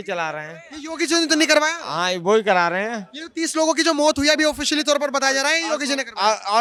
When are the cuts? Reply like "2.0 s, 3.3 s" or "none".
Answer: none